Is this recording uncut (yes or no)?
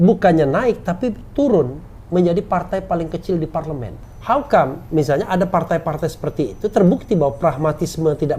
no